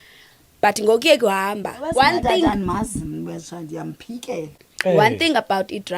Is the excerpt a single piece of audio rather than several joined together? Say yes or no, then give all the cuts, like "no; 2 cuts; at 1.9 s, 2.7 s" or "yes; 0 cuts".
no; 1 cut; at 1.8 s